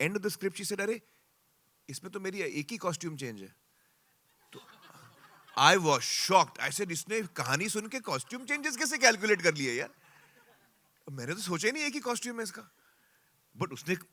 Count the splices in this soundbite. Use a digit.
0